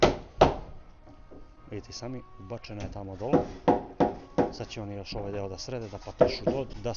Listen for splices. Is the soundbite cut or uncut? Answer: uncut